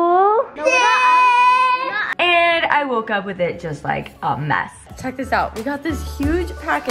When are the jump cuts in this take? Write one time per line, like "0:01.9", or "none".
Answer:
0:02.0
0:04.9